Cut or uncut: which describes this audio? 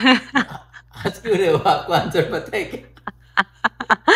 uncut